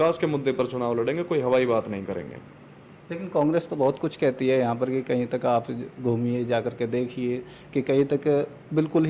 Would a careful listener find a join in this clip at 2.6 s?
no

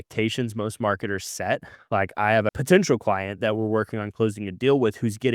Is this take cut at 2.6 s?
yes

